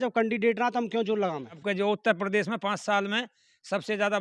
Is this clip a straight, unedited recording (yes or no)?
no